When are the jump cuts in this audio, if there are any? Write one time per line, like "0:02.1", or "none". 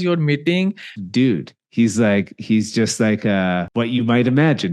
0:01.0
0:03.7